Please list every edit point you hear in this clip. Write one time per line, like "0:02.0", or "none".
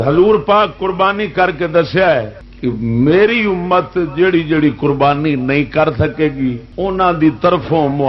0:06.7